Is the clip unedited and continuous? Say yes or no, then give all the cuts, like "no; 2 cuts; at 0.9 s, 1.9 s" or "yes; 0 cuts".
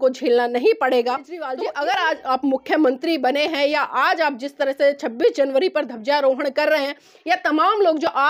no; 1 cut; at 1.3 s